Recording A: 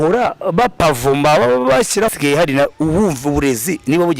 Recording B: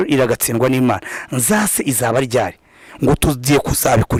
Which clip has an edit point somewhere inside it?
A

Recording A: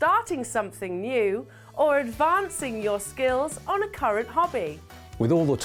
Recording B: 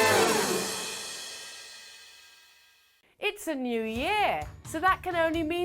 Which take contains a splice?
B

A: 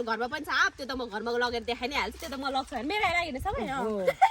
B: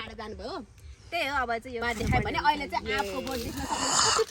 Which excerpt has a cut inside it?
B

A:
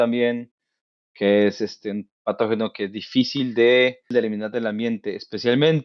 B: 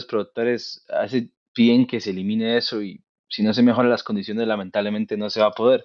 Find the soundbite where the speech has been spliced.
A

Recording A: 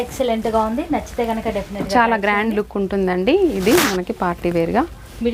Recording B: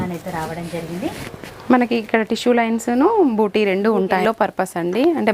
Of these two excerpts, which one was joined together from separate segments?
B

